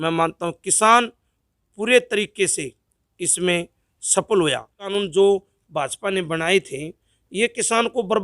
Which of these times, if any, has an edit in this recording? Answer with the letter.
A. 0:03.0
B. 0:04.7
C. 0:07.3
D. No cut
B